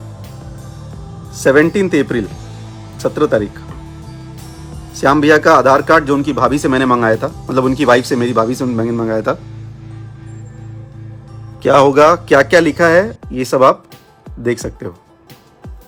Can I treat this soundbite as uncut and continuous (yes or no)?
yes